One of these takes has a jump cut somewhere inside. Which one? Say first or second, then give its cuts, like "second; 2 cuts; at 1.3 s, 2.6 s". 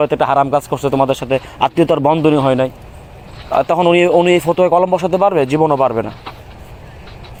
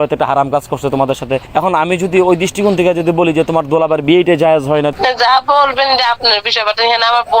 second; 2 cuts; at 1.5 s, 4.9 s